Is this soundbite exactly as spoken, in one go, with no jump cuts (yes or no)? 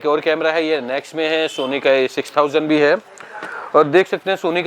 yes